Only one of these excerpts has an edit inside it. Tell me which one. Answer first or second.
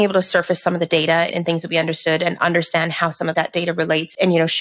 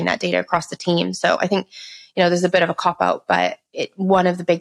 first